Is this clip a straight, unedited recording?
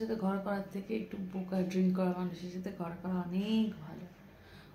yes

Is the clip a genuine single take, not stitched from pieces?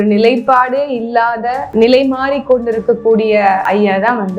no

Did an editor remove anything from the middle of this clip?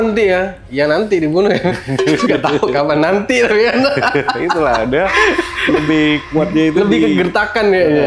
no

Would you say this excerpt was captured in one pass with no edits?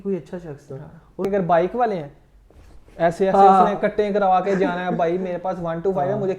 no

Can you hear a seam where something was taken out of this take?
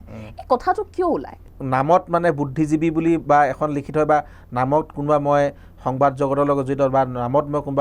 yes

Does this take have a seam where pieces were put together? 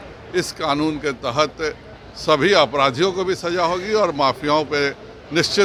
no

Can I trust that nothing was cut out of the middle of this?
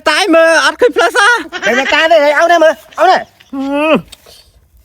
no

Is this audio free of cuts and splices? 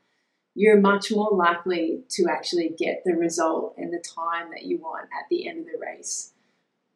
yes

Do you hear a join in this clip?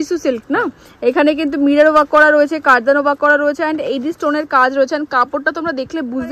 no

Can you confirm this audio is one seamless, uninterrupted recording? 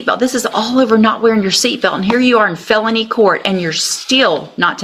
yes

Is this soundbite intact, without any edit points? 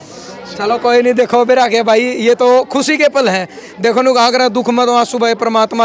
yes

